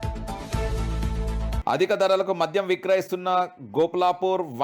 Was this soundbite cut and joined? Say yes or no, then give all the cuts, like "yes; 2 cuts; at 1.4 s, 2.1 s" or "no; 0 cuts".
yes; 1 cut; at 1.6 s